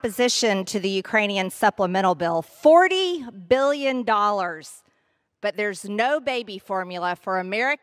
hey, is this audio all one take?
no; 1 cut; at 2.5 s

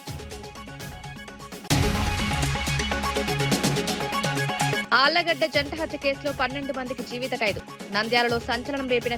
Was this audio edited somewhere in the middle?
yes; 2 cuts; at 1.7 s, 4.8 s

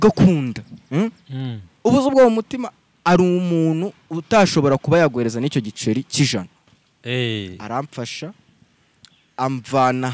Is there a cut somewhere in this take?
yes; 1 cut; at 6.7 s

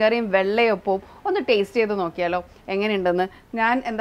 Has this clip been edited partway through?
no; 0 cuts

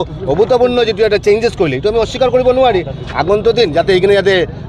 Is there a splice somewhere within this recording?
no; 0 cuts

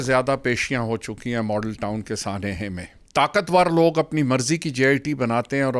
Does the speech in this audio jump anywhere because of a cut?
yes; 1 cut; at 2.9 s

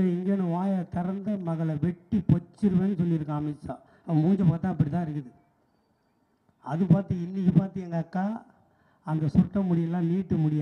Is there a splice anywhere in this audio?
no; 0 cuts

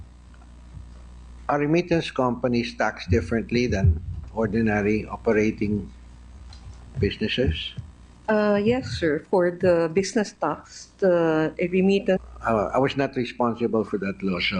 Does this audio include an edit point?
no; 0 cuts

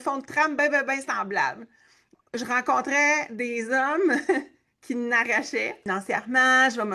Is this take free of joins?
no; 2 cuts; at 2.2 s, 5.8 s

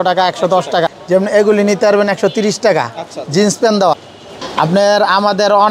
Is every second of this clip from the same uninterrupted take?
no; 2 cuts; at 0.9 s, 3.9 s

